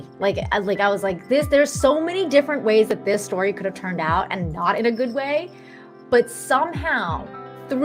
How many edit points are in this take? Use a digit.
0